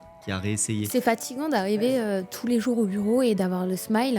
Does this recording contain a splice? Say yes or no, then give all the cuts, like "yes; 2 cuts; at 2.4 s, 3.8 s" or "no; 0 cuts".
yes; 1 cut; at 0.9 s